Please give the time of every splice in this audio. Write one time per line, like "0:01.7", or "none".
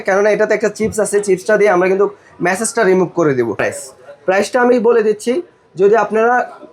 0:03.7